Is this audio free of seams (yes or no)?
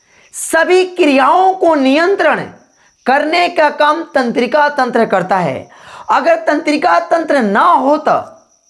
yes